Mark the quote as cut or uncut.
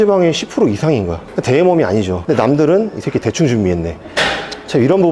uncut